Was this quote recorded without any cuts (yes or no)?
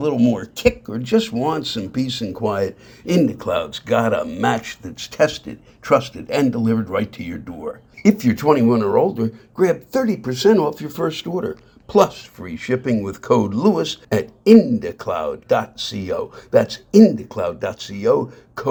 yes